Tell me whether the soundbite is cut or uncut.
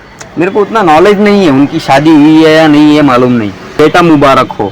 cut